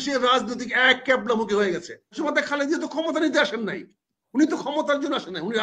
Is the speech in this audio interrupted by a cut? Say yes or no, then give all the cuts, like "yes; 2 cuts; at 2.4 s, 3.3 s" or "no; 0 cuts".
yes; 1 cut; at 2.2 s